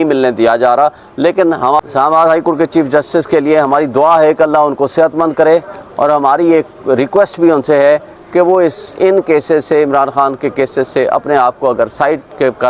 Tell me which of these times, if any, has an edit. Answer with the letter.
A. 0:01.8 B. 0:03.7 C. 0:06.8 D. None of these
A